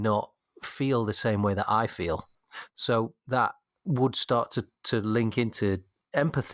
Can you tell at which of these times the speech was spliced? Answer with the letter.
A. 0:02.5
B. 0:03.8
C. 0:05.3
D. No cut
A